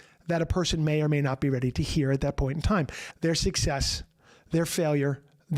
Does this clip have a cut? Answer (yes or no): yes